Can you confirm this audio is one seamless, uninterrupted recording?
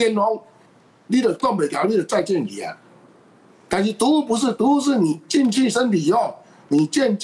yes; 0 cuts

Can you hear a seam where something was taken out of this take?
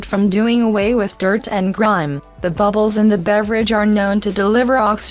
yes; 1 cut; at 2.1 s

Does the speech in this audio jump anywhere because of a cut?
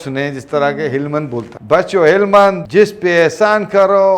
yes; 2 cuts; at 1.5 s, 2.6 s

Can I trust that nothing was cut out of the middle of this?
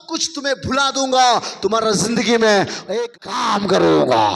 no; 1 cut; at 3.0 s

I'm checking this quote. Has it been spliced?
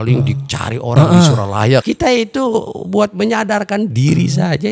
yes; 1 cut; at 1.8 s

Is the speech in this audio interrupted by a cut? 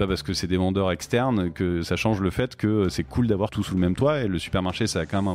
yes; 1 cut; at 3.6 s

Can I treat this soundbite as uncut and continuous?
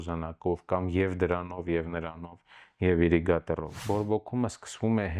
no; 1 cut; at 3.8 s

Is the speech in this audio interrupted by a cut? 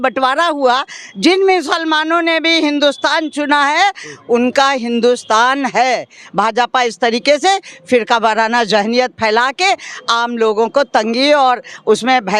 no; 0 cuts

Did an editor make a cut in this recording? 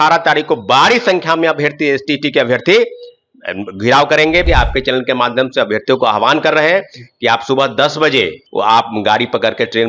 yes; 2 cuts; at 4.5 s, 8.4 s

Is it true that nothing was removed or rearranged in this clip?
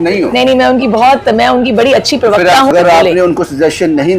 no; 1 cut; at 2.7 s

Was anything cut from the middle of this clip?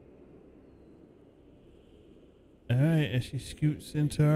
no; 0 cuts

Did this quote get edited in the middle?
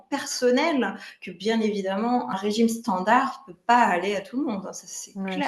yes; 1 cut; at 2.3 s

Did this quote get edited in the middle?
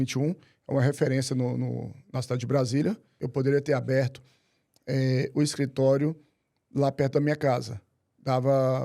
yes; 1 cut; at 3.1 s

